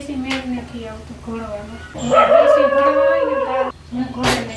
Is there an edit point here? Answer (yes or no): yes